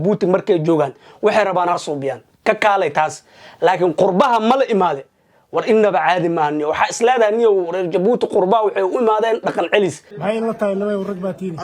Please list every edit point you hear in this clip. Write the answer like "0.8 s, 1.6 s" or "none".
10.1 s